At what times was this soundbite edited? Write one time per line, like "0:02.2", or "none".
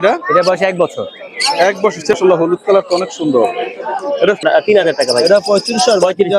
0:02.1
0:04.4